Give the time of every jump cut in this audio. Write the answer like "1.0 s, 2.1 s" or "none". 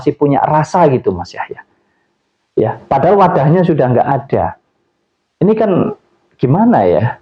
none